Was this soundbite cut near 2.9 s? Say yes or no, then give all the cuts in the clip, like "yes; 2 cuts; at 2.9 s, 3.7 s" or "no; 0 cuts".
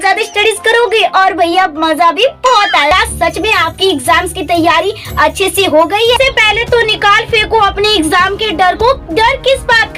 yes; 2 cuts; at 2.9 s, 6.2 s